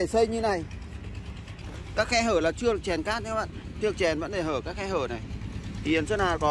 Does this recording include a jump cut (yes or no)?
yes